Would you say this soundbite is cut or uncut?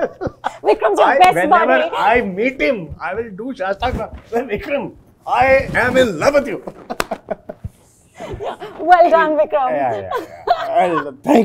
uncut